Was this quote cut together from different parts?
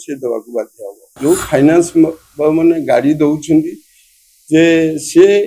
yes; 1 cut; at 1.1 s

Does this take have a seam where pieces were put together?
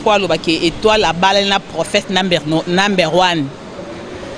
no; 0 cuts

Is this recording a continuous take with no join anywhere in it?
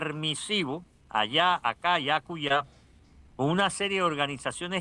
yes; 0 cuts

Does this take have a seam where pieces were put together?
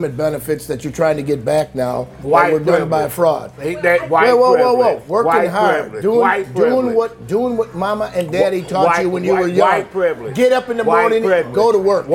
no; 0 cuts

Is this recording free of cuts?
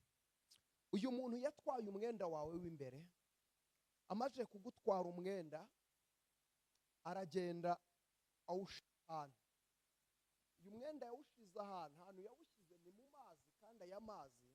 yes; 0 cuts

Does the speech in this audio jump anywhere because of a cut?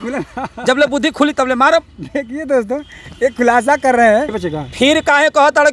yes; 1 cut; at 4.4 s

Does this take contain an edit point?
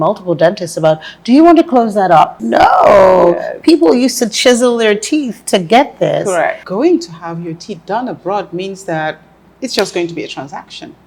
yes; 2 cuts; at 2.4 s, 6.6 s

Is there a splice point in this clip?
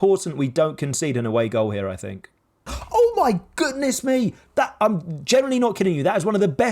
yes; 1 cut; at 2.7 s

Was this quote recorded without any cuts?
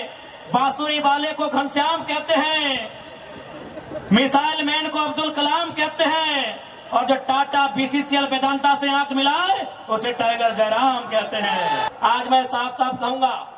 no; 1 cut; at 11.9 s

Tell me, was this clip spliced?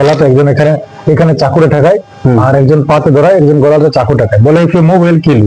no; 0 cuts

